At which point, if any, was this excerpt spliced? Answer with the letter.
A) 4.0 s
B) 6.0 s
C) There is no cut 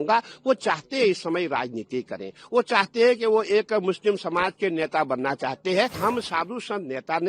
B